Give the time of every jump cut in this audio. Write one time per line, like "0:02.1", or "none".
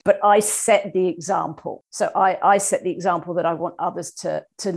none